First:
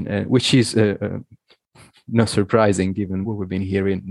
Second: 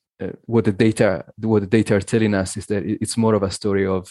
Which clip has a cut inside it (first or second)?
first